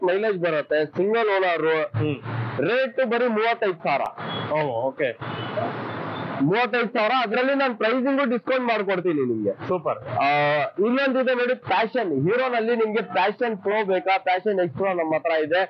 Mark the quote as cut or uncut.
uncut